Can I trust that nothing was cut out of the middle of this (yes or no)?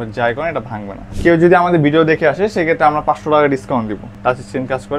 no